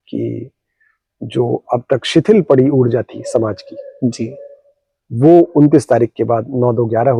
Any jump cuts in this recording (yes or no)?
no